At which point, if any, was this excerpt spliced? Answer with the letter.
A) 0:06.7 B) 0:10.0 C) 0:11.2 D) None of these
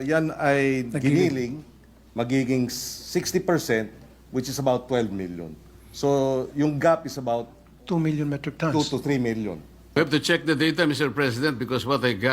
B